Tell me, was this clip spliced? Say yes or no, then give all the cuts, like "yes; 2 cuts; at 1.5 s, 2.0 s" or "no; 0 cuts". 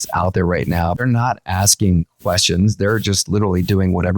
yes; 1 cut; at 1.0 s